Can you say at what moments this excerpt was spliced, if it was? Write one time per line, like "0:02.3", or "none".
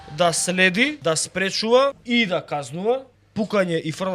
0:01.0
0:02.0
0:03.2

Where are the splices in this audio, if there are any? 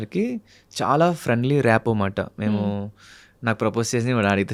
none

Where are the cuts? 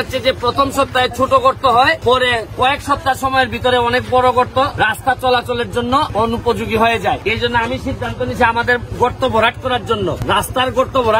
0:02.0
0:04.7
0:06.1
0:07.2
0:10.2

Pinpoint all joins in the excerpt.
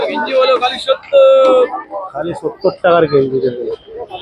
none

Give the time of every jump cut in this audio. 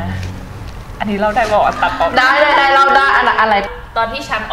none

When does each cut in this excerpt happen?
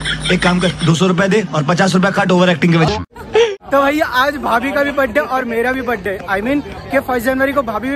0:03.5

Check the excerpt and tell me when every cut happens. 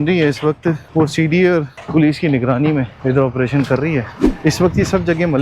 0:00.8
0:01.8
0:02.9
0:04.2

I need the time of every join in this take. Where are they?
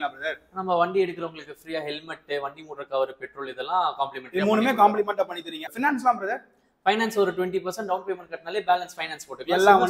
0:05.6

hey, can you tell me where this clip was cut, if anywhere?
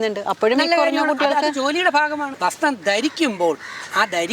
0:02.3

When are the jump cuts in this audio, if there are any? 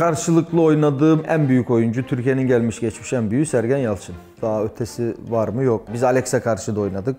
0:01.2
0:05.9

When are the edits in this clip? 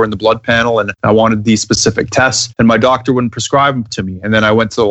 0:00.9
0:02.4

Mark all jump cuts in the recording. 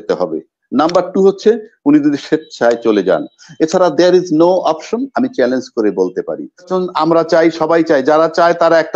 0:06.7

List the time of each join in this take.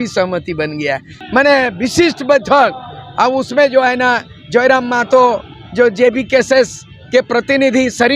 0:01.1

